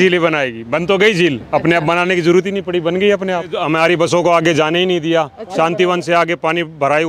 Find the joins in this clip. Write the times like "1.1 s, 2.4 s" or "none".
3.6 s